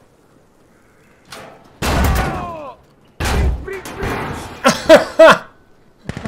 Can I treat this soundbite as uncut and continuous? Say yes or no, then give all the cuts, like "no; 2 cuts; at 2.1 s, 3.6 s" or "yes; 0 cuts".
yes; 0 cuts